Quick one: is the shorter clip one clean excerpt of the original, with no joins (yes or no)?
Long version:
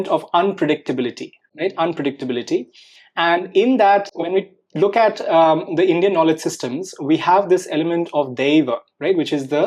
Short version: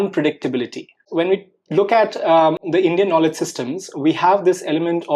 no